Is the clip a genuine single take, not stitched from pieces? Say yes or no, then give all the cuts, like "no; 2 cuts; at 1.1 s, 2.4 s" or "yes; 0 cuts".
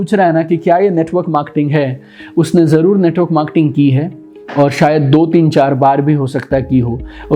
yes; 0 cuts